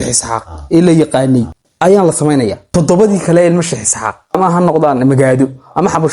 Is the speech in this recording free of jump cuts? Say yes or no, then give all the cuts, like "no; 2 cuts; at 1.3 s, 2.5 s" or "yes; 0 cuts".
no; 3 cuts; at 1.6 s, 2.6 s, 4.4 s